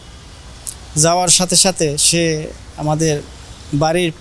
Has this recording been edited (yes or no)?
no